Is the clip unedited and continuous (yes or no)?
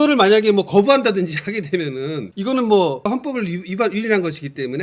no